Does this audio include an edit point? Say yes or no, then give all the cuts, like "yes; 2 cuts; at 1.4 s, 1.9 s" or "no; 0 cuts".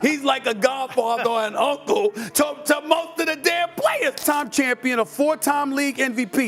yes; 1 cut; at 4.2 s